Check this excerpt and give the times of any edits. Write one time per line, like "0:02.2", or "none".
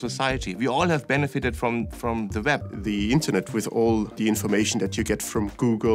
0:02.7
0:04.2